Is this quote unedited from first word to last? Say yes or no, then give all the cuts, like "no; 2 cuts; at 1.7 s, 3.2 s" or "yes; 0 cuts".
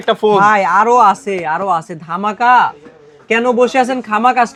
yes; 0 cuts